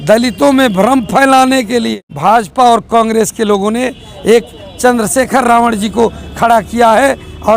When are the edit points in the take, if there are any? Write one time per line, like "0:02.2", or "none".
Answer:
0:02.0